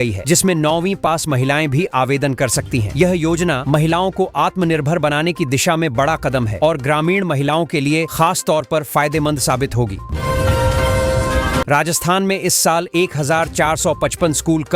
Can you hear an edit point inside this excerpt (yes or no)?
yes